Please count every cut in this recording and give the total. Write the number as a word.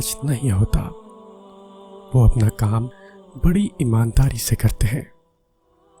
one